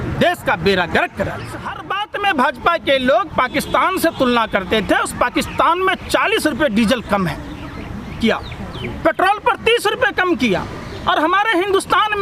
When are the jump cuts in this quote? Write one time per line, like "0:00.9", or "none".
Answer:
0:01.8